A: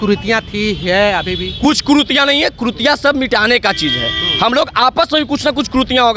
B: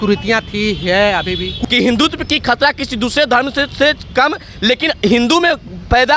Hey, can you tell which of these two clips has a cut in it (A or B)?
B